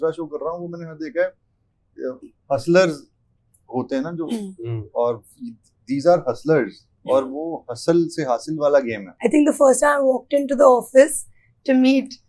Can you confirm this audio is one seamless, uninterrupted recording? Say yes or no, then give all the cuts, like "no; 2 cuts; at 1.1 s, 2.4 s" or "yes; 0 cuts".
no; 1 cut; at 9.0 s